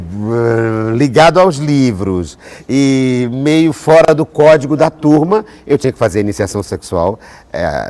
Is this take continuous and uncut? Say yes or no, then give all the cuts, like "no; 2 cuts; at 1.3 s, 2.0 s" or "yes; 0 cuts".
yes; 0 cuts